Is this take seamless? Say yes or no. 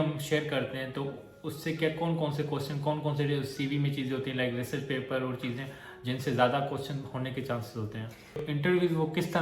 no